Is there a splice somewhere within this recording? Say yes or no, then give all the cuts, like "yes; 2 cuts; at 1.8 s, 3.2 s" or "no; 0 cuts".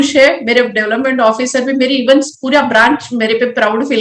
no; 0 cuts